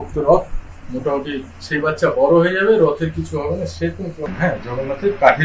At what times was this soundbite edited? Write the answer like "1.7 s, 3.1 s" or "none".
4.3 s